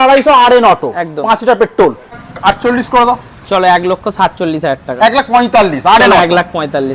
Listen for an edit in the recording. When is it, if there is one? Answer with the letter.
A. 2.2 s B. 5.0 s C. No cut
A